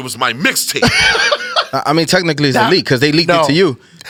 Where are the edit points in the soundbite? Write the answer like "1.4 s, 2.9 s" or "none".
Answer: none

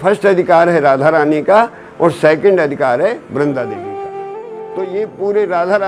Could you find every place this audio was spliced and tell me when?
4.4 s

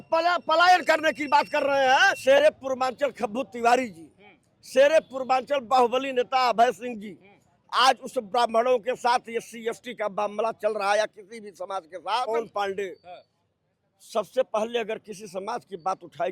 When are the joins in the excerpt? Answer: 2.2 s, 12.3 s

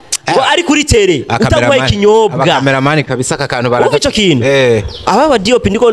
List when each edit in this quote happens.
none

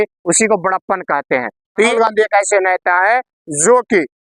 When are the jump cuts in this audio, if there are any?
1.9 s

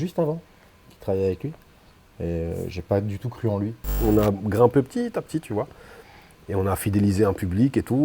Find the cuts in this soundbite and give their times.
3.9 s

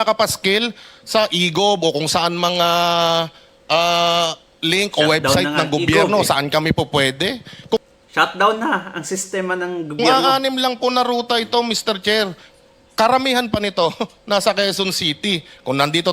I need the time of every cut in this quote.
none

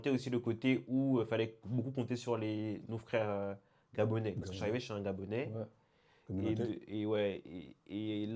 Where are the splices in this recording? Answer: none

